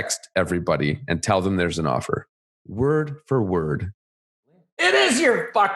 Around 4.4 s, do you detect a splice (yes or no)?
yes